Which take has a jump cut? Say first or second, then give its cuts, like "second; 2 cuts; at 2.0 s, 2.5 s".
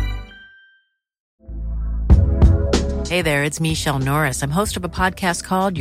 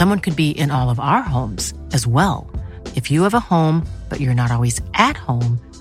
first; 1 cut; at 1.3 s